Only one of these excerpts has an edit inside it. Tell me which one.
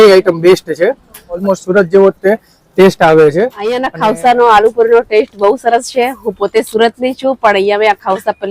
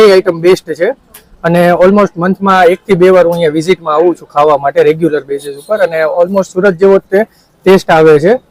first; 2 cuts; at 1.4 s, 3.8 s

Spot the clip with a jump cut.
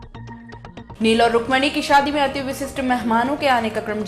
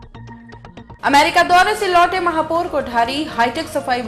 second; 1 cut; at 0.9 s

